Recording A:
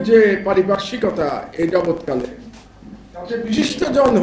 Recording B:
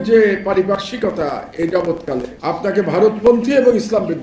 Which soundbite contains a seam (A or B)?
B